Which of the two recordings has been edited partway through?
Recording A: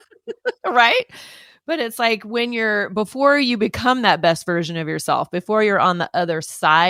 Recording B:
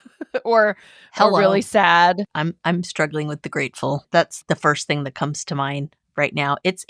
B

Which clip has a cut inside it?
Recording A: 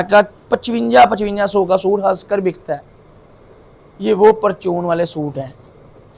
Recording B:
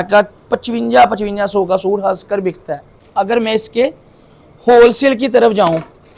B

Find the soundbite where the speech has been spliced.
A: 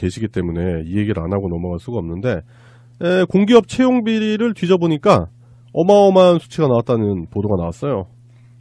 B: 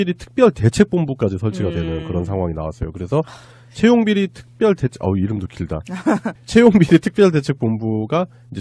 B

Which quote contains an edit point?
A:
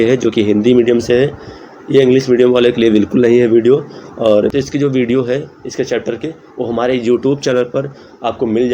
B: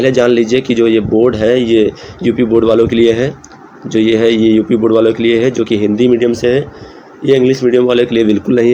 A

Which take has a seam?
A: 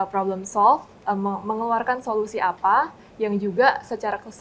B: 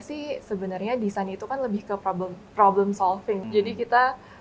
B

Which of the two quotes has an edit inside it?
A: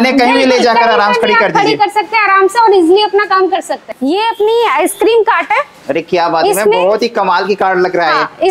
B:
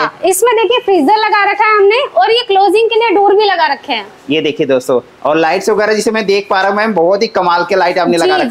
A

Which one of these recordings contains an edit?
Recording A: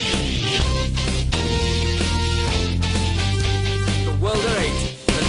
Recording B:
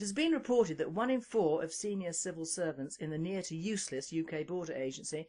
B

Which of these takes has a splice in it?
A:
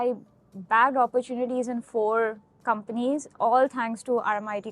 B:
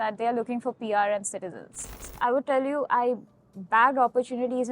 B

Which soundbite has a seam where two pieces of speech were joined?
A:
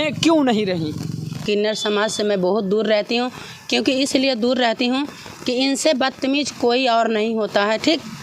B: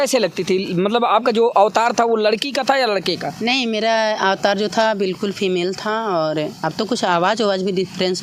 A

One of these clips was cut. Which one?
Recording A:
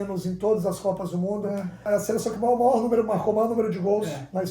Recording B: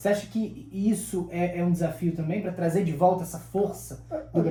A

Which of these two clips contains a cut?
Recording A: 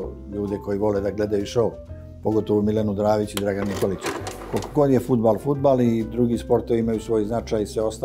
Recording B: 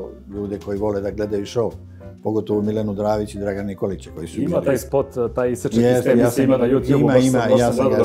A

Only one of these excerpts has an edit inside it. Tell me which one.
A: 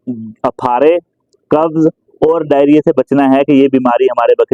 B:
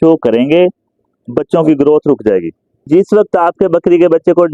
B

